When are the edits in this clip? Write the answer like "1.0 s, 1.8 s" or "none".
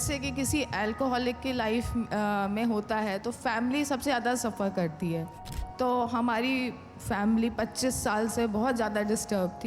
5.4 s